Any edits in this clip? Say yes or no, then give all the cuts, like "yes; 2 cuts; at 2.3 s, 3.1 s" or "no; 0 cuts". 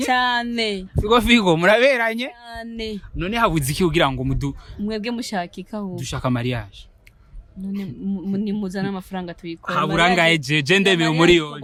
no; 0 cuts